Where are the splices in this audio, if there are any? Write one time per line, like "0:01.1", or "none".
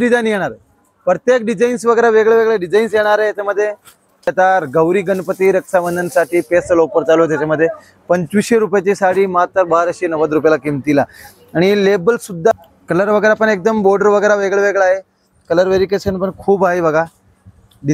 0:04.3
0:12.5